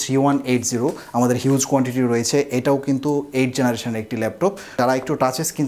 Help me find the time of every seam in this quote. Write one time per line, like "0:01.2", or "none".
0:04.8